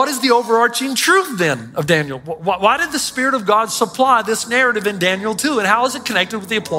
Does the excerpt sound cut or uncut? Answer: uncut